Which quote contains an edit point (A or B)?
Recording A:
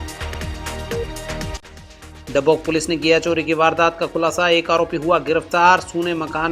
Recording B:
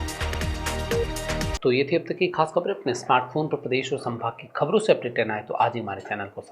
A